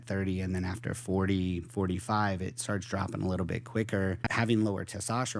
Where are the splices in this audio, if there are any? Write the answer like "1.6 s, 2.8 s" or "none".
4.2 s